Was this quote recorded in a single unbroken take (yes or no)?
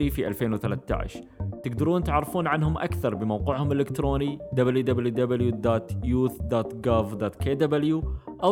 yes